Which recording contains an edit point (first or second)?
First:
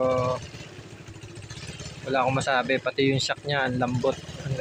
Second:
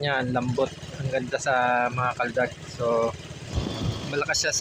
second